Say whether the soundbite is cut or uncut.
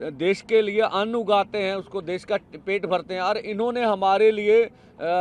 uncut